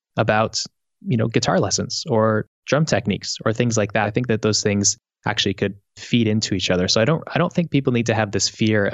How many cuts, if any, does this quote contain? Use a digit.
1